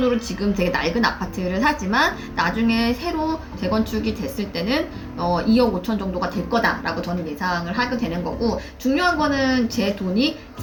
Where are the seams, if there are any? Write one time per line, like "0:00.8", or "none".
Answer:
none